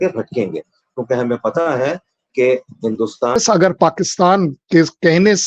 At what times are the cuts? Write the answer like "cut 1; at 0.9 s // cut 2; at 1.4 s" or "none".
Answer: cut 1; at 3.4 s